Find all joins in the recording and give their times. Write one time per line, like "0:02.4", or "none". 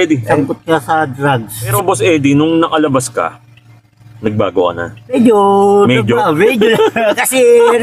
0:01.7